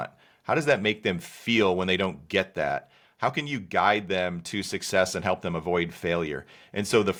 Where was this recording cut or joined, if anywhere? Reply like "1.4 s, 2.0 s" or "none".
none